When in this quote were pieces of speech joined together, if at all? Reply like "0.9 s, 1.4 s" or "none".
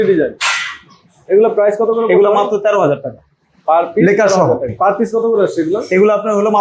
4.7 s